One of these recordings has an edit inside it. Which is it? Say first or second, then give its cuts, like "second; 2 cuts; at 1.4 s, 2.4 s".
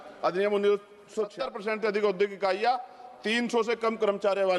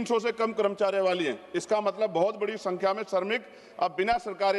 first; 1 cut; at 1.3 s